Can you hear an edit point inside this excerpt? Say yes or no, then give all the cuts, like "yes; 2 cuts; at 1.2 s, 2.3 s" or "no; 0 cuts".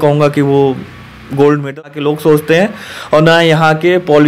yes; 1 cut; at 1.8 s